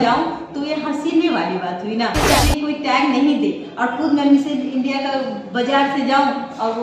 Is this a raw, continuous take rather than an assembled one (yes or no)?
no